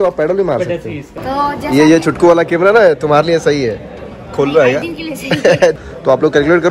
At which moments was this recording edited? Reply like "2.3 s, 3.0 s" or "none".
1.1 s, 5.8 s

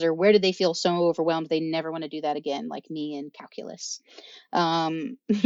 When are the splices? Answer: none

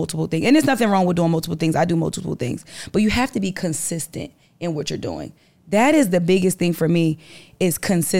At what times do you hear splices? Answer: none

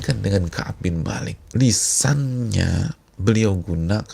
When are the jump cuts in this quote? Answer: 1.4 s

